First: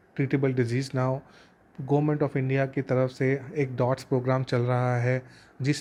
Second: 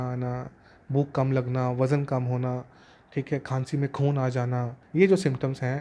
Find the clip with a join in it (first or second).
second